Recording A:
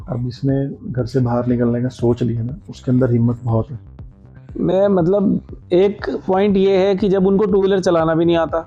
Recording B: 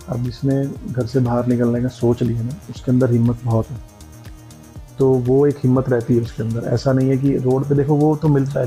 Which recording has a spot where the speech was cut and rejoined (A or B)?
A